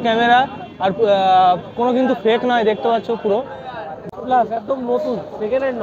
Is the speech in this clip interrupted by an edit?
yes; 1 cut; at 4.1 s

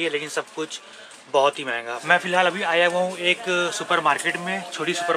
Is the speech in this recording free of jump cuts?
no; 1 cut; at 1.9 s

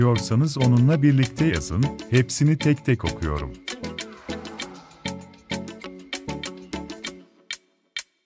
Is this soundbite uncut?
no; 1 cut; at 3.5 s

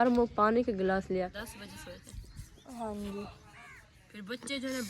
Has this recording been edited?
yes; 1 cut; at 1.3 s

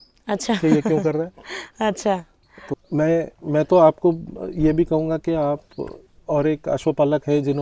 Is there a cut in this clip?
no; 0 cuts

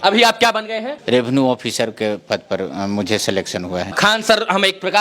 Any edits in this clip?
yes; 2 cuts; at 0.9 s, 4.0 s

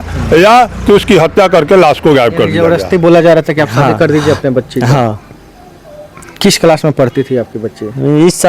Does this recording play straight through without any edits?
no; 1 cut; at 2.6 s

